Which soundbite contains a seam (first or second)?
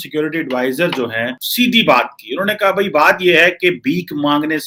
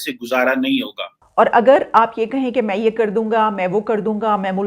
second